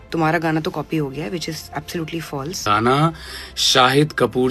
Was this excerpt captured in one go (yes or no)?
no